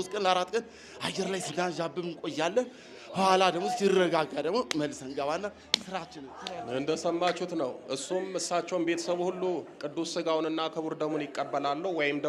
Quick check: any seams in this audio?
no; 0 cuts

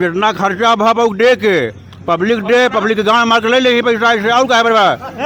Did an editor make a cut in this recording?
no; 0 cuts

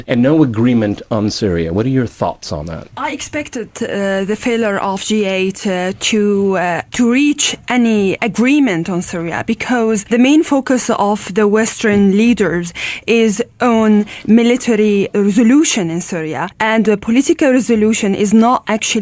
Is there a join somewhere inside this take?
yes; 1 cut; at 6.0 s

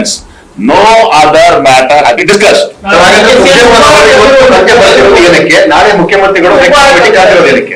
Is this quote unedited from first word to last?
no; 1 cut; at 6.2 s

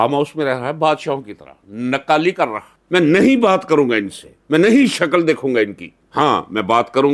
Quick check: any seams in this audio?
yes; 1 cut; at 2.7 s

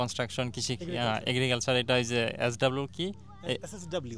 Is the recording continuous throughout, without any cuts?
yes; 0 cuts

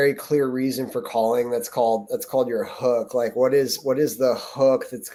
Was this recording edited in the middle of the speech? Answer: no; 0 cuts

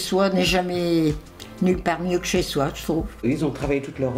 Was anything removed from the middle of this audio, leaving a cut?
yes; 1 cut; at 3.2 s

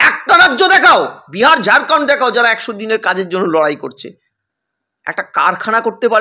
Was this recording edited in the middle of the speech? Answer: no; 0 cuts

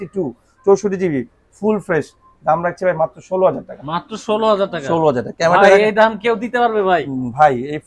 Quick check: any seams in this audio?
no; 0 cuts

